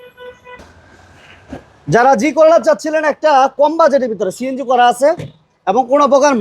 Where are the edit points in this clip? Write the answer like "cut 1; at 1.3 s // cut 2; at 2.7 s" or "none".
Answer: none